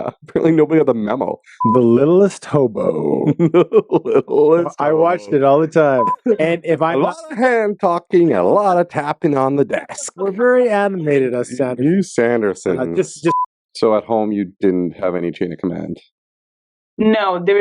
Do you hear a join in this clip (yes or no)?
yes